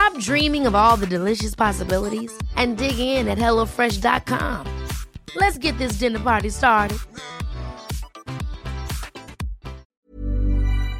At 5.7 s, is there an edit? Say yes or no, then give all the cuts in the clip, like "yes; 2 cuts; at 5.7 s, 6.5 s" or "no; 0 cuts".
no; 1 cut; at 9.9 s